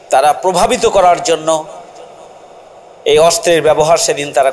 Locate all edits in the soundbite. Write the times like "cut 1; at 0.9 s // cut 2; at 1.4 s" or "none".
none